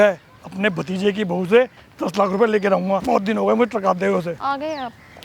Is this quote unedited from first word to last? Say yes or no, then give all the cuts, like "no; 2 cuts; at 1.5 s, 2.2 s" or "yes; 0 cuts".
no; 2 cuts; at 3.0 s, 4.4 s